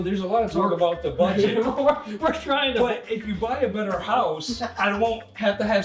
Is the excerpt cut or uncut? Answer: uncut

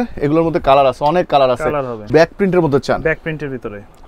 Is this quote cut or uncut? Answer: cut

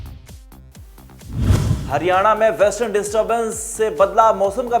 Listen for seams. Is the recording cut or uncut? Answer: cut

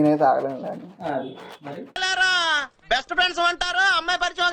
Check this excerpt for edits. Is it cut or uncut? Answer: cut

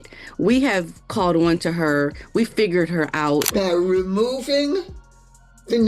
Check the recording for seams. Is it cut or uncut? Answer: cut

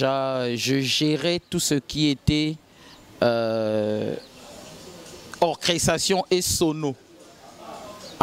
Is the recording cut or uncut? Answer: uncut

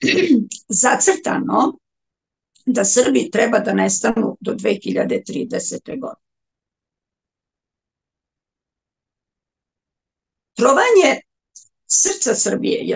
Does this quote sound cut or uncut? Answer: uncut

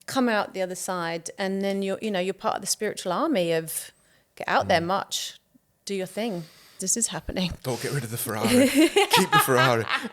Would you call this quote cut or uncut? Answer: cut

